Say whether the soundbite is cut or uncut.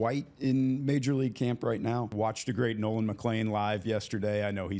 cut